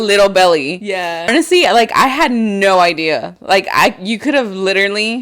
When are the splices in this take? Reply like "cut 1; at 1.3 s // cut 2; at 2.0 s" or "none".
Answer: cut 1; at 1.3 s